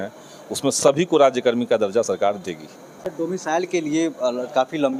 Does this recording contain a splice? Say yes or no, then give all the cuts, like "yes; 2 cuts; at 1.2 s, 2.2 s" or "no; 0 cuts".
no; 0 cuts